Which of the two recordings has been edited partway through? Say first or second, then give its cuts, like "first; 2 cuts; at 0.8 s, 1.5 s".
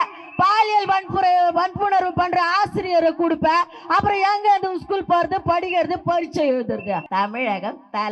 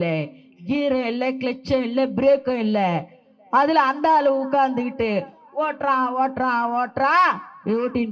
first; 1 cut; at 7.1 s